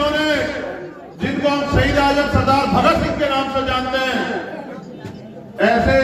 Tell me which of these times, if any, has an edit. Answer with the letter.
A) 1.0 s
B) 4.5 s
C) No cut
C